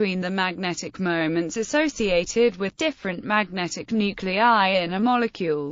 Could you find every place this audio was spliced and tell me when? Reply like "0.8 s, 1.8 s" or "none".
none